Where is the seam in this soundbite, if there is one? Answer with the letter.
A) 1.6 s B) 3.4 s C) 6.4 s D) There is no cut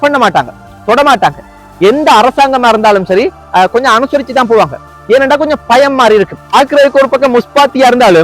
C